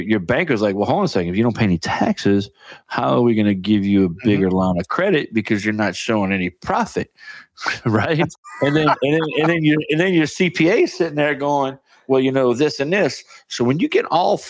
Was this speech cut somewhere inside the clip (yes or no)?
yes